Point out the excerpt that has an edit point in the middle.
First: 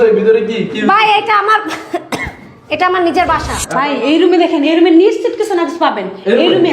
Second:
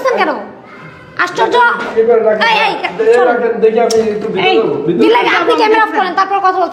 first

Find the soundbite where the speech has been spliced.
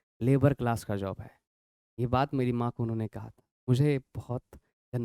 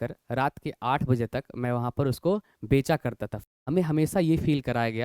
second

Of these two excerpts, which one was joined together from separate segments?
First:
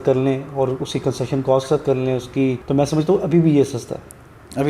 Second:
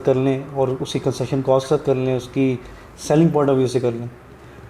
first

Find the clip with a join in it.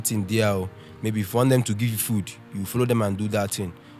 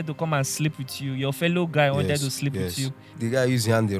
second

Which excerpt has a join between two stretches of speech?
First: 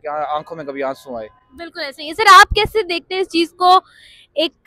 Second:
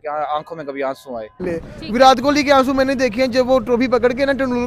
second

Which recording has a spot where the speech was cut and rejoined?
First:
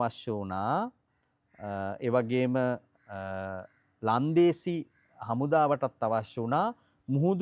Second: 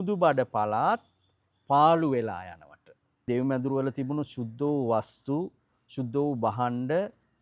second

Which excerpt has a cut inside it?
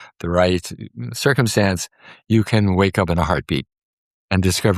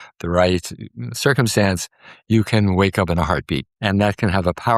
second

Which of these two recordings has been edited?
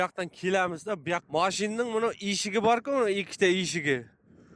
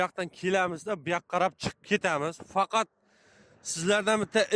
first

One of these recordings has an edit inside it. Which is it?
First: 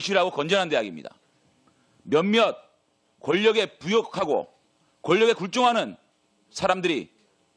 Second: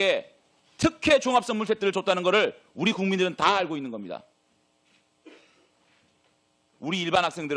first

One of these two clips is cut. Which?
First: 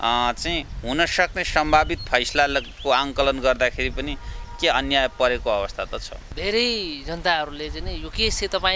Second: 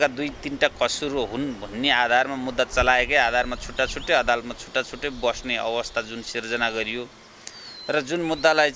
first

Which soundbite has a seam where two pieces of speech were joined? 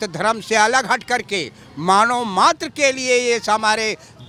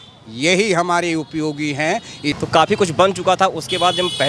second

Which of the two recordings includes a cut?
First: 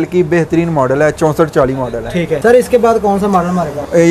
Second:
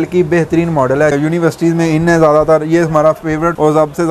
second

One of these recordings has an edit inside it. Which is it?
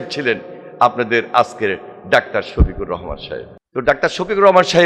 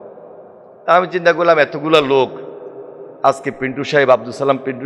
first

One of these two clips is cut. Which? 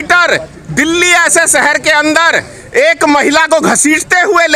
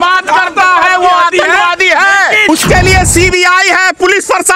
second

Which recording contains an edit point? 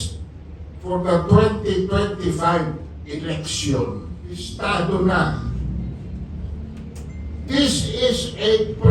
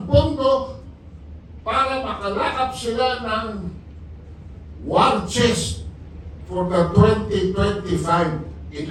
first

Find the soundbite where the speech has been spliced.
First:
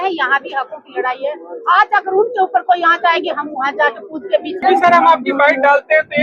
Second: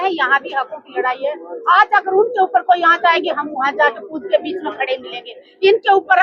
first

